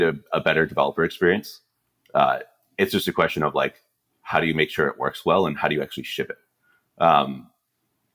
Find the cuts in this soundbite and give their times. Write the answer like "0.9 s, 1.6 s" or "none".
none